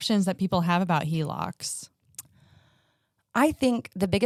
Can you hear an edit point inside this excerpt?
no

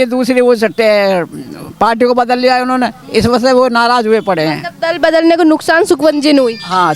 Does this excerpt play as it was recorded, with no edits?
yes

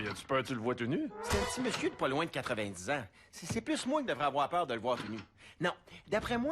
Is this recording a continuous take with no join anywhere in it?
no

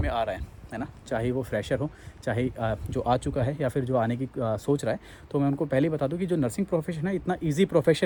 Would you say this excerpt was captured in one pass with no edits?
yes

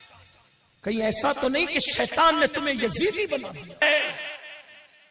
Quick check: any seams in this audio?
yes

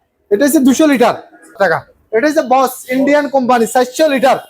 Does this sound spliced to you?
yes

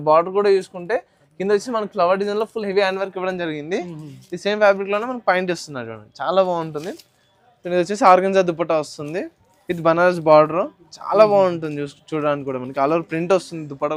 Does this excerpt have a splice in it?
no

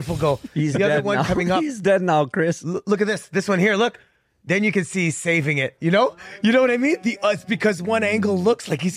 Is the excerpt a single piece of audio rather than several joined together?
yes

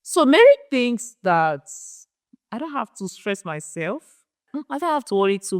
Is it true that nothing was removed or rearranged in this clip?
no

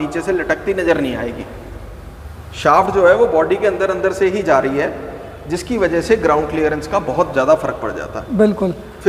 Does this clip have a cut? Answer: no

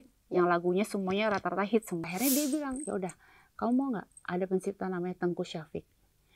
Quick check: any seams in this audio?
yes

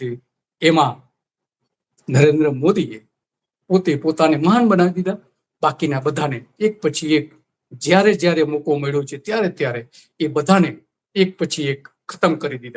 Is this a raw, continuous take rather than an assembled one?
yes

